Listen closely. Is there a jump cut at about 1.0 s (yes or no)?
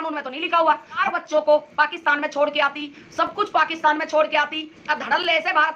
yes